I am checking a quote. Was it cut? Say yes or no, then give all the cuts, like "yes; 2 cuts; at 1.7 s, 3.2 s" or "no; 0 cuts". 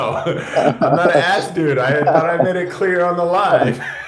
no; 0 cuts